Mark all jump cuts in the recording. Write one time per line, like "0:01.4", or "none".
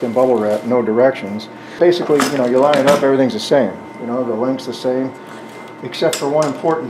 0:01.8